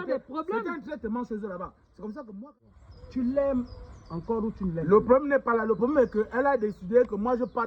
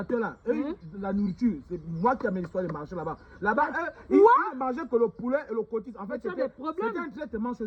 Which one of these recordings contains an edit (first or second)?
first